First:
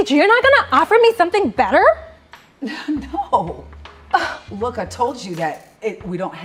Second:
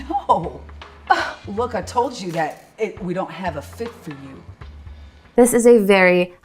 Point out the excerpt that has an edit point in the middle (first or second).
second